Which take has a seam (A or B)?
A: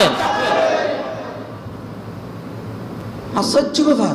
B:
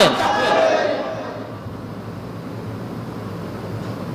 A